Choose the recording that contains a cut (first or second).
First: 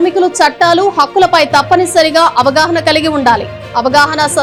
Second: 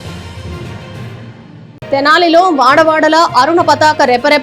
second